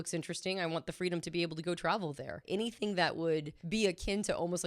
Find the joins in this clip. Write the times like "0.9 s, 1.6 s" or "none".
2.4 s, 3.6 s